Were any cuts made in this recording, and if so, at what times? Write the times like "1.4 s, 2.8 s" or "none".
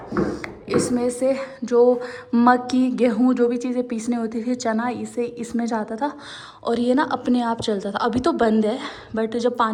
none